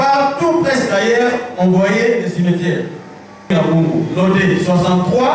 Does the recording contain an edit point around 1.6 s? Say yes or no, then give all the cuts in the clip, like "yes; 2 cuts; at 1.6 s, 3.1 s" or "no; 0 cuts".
no; 1 cut; at 3.5 s